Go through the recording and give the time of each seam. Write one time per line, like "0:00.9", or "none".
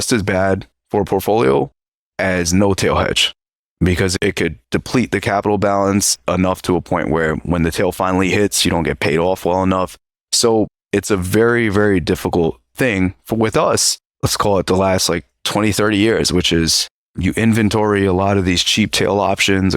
0:04.1
0:14.1